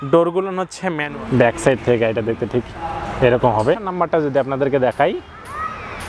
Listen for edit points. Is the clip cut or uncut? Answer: cut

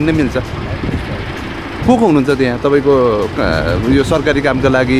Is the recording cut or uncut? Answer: uncut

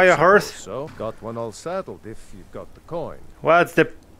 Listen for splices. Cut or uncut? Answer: cut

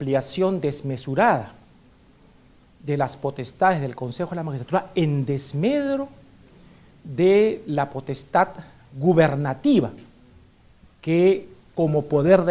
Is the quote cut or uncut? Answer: cut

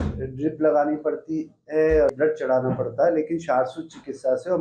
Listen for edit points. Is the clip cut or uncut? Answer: cut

